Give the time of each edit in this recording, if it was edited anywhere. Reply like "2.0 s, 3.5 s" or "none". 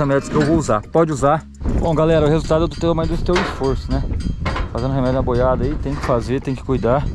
1.7 s